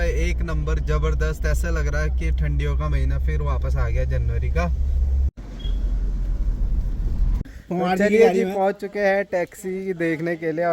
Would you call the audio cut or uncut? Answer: cut